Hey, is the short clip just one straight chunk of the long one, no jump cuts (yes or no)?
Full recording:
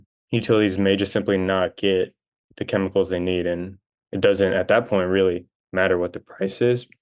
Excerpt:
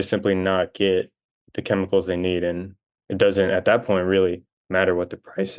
yes